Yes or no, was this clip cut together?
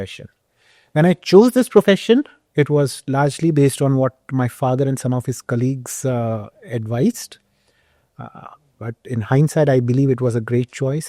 no